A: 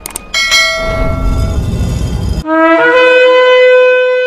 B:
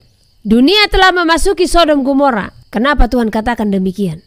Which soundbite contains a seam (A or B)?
B